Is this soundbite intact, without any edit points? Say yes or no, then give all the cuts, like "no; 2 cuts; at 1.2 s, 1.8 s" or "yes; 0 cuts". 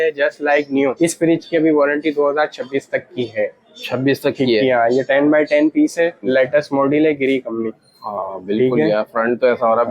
no; 2 cuts; at 1.0 s, 6.2 s